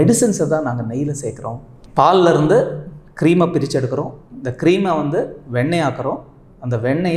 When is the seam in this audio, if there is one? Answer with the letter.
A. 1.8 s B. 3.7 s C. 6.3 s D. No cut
A